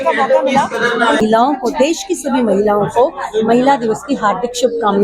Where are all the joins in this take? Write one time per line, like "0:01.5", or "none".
0:01.2